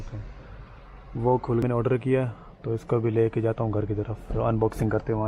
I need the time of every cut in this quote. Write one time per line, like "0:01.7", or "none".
0:01.6